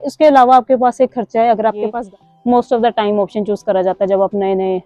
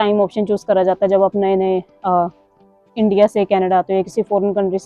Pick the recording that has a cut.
first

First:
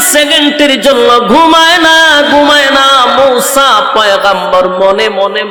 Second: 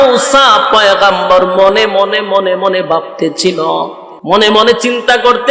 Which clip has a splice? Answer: second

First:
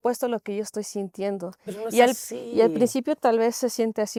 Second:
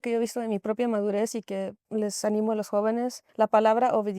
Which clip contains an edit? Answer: second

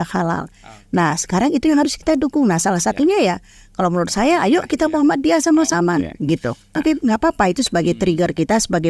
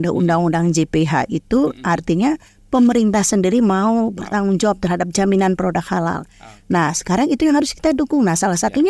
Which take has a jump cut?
first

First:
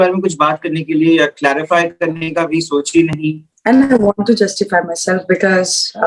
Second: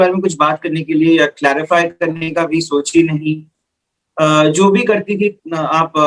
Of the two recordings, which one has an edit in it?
first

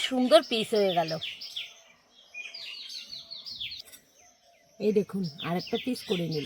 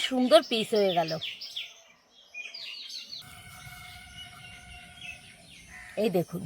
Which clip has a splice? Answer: second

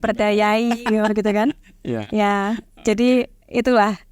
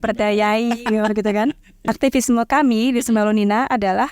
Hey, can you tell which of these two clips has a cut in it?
second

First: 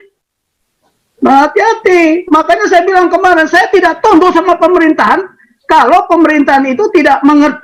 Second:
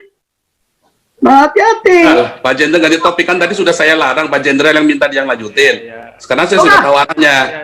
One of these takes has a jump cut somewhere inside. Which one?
second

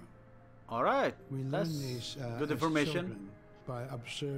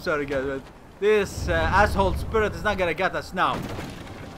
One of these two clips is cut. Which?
first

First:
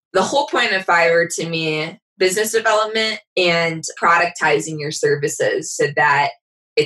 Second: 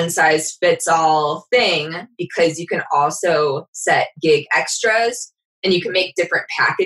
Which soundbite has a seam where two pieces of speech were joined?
first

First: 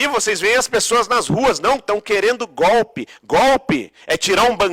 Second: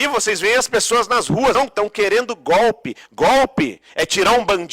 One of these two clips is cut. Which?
second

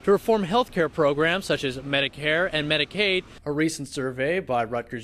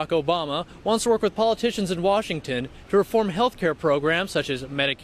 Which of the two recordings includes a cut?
first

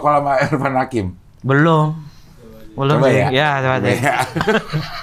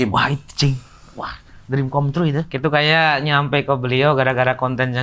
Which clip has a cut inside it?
second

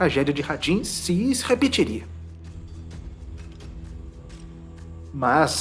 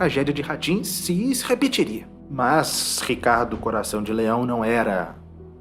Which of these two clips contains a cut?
second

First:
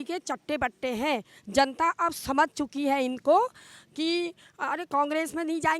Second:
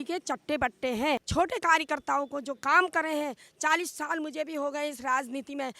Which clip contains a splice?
second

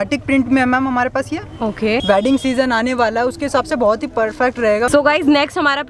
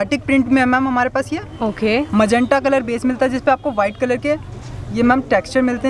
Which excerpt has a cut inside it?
first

